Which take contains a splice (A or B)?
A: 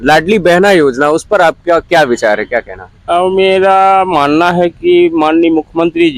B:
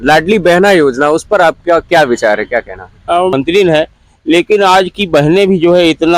B